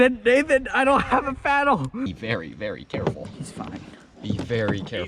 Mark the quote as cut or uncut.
cut